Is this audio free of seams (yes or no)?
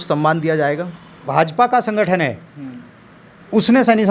no